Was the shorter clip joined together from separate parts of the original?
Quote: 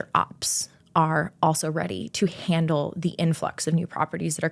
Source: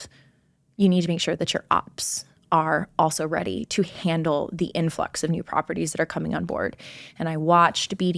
no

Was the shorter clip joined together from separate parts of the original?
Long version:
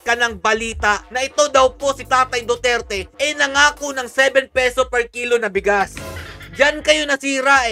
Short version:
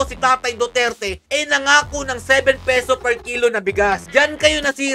yes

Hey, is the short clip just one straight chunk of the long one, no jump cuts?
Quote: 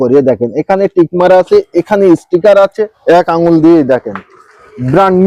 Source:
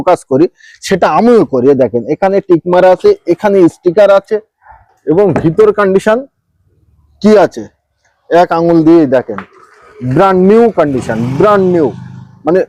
no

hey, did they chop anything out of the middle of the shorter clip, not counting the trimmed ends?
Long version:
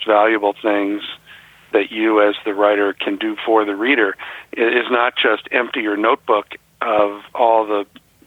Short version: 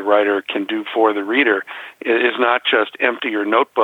no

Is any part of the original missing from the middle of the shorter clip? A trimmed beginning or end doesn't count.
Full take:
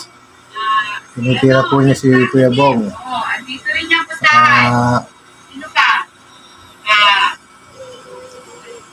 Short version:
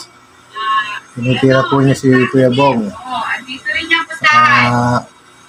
no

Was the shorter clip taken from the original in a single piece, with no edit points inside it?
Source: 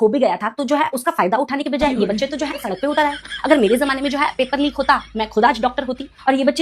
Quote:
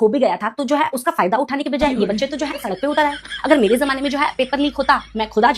yes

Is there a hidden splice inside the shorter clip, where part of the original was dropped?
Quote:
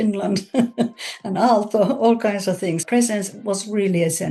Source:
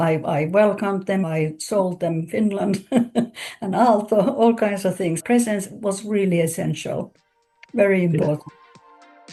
no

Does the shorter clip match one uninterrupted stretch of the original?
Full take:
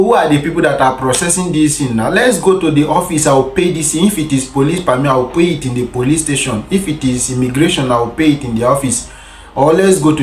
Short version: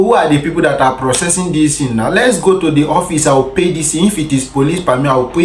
yes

